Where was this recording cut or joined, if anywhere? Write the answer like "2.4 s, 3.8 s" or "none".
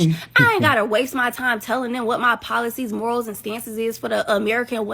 3.5 s